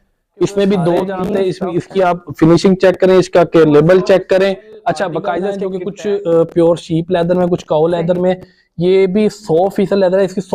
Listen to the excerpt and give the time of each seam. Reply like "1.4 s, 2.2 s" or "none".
1.3 s, 5.8 s